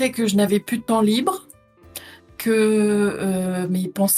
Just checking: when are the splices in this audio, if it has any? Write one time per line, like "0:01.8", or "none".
none